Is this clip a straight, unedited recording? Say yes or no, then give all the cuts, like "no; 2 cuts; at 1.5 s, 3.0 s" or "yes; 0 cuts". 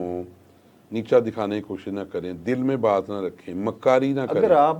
yes; 0 cuts